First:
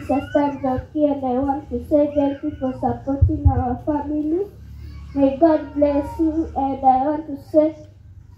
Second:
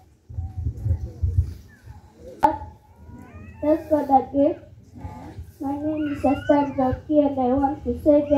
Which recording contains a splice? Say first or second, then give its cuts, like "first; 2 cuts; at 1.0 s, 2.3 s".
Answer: second; 1 cut; at 2.4 s